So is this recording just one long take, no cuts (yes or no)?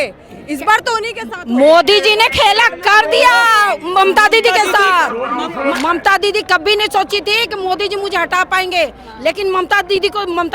no